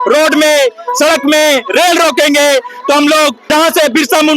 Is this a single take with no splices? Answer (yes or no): no